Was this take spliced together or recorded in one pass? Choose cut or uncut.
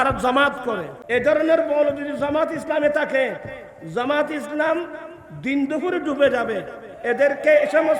cut